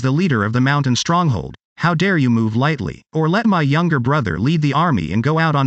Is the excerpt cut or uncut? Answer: uncut